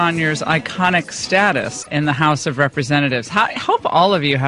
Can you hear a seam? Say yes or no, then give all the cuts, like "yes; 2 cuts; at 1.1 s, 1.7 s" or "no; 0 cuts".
no; 0 cuts